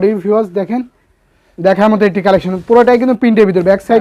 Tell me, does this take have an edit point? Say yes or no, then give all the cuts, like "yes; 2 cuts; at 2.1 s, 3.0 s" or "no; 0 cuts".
no; 0 cuts